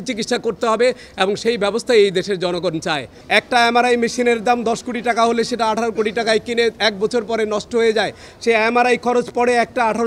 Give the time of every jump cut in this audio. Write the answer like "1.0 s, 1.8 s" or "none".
3.1 s